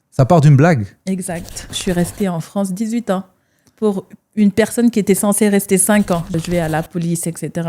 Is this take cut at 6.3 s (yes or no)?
yes